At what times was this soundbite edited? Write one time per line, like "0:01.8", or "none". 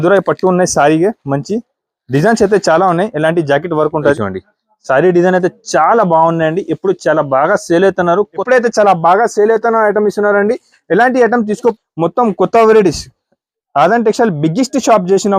0:04.2
0:08.4
0:11.8